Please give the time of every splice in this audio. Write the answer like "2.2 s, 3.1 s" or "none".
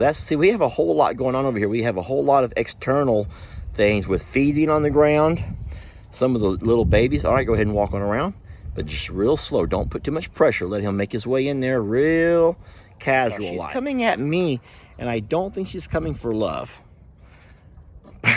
13.6 s